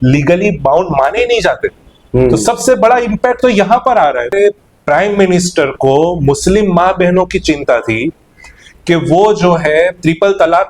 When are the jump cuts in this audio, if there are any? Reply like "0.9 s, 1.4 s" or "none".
4.3 s